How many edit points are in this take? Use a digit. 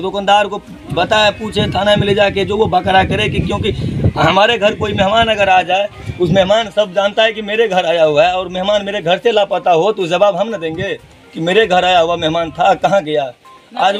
0